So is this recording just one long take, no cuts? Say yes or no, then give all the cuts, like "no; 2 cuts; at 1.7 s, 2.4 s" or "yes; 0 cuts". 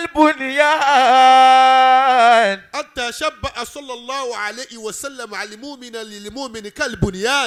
yes; 0 cuts